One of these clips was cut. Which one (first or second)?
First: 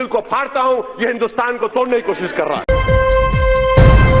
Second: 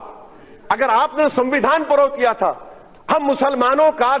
first